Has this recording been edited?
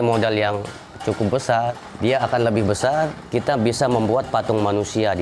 yes; 2 cuts; at 1.8 s, 3.2 s

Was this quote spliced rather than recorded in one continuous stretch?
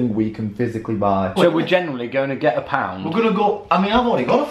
yes; 1 cut; at 1.3 s

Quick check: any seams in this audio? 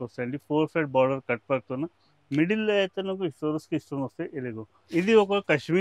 yes; 1 cut; at 4.7 s

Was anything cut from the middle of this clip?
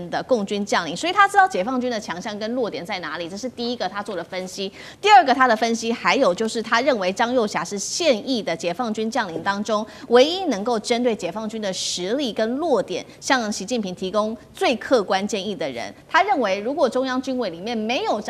no; 0 cuts

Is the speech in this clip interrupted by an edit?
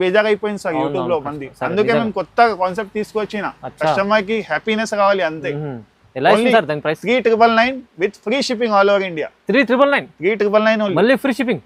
no; 0 cuts

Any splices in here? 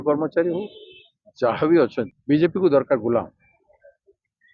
yes; 1 cut; at 2.1 s

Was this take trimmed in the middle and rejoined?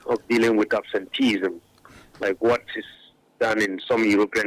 no; 0 cuts

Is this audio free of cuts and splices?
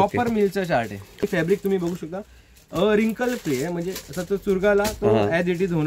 no; 1 cut; at 1.2 s

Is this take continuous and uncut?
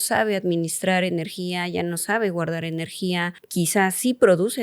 no; 1 cut; at 3.4 s

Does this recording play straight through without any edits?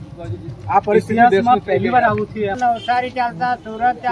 no; 1 cut; at 2.6 s

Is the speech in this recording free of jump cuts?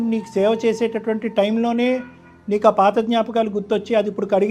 yes; 0 cuts

